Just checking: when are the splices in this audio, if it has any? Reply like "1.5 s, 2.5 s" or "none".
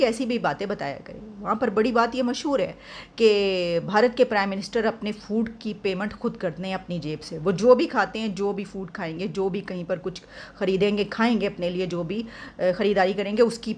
none